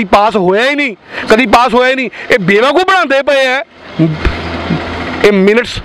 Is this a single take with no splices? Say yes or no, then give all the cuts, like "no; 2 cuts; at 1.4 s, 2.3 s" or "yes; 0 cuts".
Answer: yes; 0 cuts